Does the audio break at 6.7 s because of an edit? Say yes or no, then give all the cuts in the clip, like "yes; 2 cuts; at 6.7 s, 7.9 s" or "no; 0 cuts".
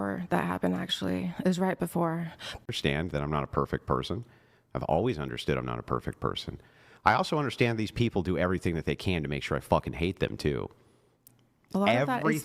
no; 1 cut; at 2.6 s